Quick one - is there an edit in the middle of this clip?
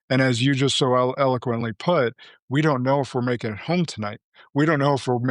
no; 0 cuts

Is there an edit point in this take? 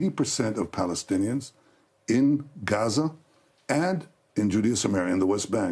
no; 0 cuts

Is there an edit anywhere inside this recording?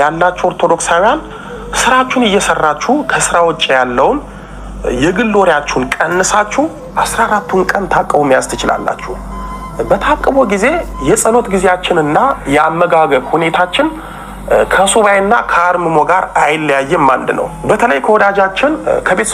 no; 0 cuts

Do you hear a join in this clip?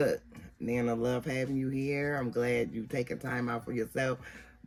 no; 0 cuts

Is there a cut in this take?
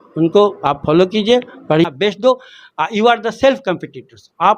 yes; 1 cut; at 1.8 s

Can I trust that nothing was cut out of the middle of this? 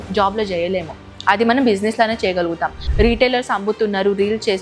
no; 1 cut; at 2.8 s

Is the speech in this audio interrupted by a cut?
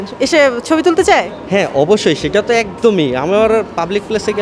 no; 0 cuts

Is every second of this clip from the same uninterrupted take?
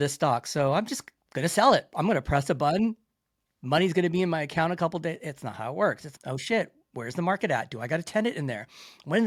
yes; 0 cuts

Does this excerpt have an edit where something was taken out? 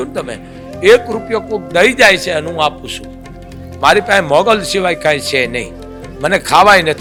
no; 0 cuts

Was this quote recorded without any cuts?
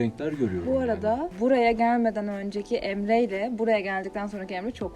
no; 1 cut; at 1.3 s

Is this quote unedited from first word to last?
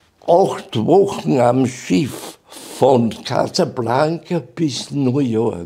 yes; 0 cuts

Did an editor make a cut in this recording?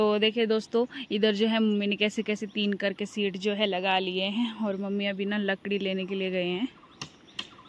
no; 0 cuts

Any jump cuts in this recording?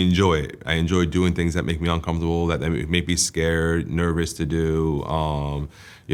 no; 0 cuts

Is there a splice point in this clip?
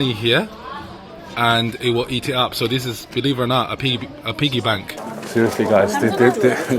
yes; 1 cut; at 5.0 s

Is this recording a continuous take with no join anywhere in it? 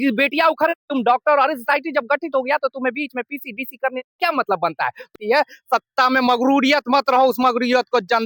no; 1 cut; at 5.1 s

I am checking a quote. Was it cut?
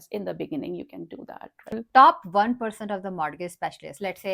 yes; 1 cut; at 1.8 s

